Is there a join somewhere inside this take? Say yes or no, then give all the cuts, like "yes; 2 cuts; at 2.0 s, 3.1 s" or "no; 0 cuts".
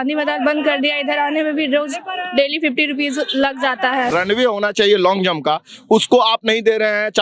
yes; 1 cut; at 4.1 s